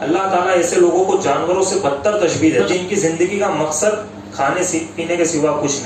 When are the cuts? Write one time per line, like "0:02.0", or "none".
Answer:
0:02.7